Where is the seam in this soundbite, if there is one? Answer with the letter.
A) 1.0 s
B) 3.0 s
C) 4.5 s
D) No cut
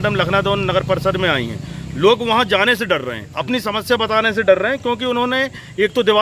D